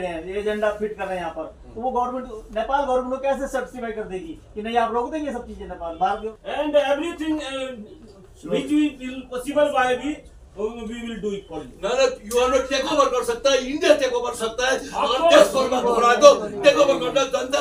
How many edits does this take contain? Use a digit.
1